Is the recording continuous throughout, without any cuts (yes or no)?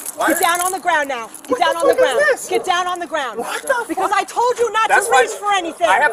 yes